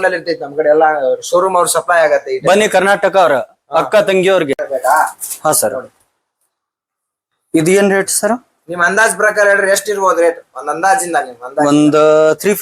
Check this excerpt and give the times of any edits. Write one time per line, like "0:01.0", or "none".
0:04.5